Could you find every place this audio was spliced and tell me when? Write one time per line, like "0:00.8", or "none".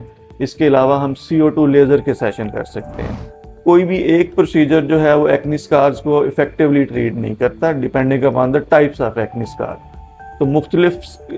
none